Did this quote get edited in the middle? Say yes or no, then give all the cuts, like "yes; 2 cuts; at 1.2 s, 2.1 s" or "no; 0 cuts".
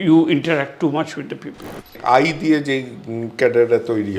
yes; 1 cut; at 1.9 s